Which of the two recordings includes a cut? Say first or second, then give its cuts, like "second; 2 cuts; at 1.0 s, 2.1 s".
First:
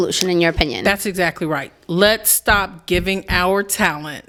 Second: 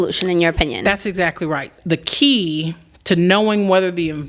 second; 1 cut; at 1.7 s